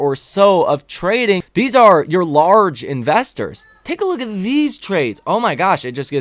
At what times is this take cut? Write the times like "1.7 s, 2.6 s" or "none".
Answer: 1.5 s